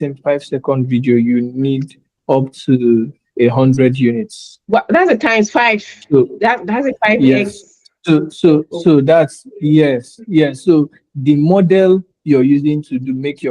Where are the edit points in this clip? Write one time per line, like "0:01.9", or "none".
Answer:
none